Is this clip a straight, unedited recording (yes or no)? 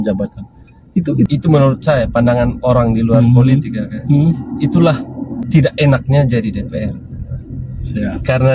no